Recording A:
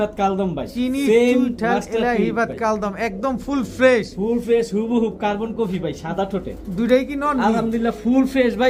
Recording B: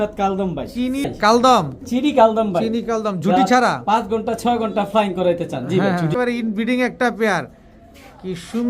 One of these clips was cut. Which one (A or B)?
B